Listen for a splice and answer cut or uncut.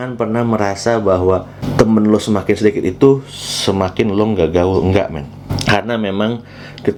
uncut